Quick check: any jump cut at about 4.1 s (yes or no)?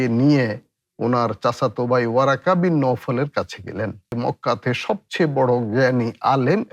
yes